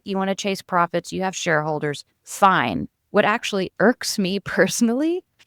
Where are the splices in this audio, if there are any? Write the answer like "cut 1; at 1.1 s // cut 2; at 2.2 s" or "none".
none